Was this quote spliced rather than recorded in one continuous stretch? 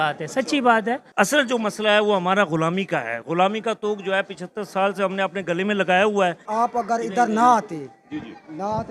yes; 2 cuts; at 1.1 s, 6.4 s

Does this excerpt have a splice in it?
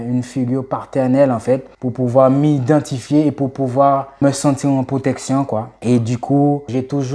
no; 0 cuts

